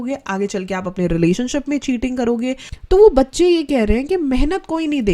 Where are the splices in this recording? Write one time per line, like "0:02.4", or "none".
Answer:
0:02.7